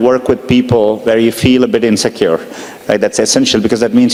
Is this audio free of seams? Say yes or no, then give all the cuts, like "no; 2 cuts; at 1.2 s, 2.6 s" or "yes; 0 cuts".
yes; 0 cuts